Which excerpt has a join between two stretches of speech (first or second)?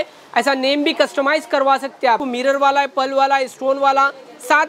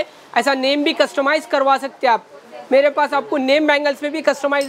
first